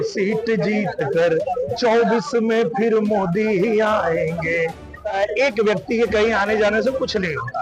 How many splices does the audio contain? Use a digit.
1